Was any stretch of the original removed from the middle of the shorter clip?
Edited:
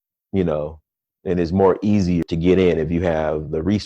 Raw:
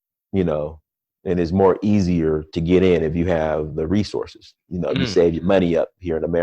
yes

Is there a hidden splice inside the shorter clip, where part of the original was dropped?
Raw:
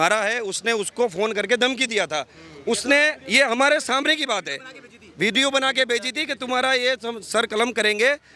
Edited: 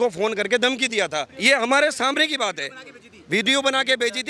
yes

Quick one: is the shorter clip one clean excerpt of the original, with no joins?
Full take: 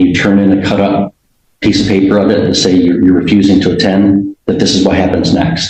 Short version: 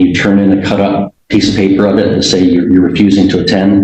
no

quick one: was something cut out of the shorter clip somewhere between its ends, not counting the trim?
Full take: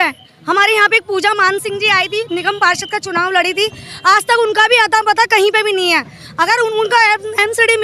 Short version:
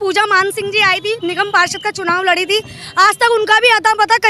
no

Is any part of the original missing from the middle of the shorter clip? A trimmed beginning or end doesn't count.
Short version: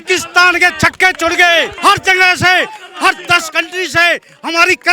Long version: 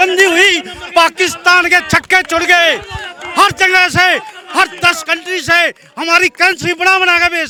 yes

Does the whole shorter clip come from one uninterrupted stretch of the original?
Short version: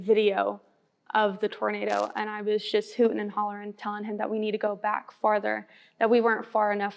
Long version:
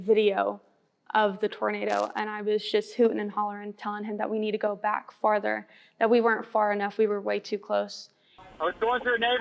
yes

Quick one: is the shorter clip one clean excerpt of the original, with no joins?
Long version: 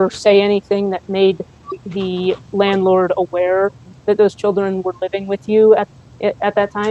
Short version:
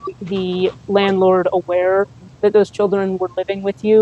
yes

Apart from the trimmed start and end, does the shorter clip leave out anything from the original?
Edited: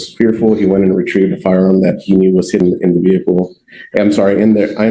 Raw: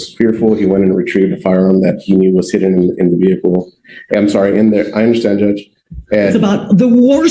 yes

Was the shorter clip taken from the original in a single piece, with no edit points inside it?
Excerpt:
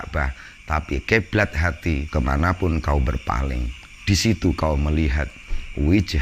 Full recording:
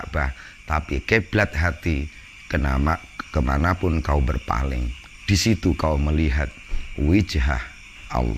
no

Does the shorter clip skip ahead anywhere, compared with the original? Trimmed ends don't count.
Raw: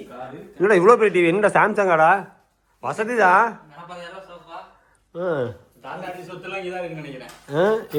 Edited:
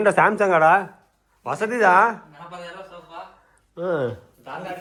no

